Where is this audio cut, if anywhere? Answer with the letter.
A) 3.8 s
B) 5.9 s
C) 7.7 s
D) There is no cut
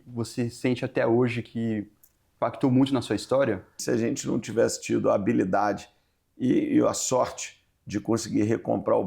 A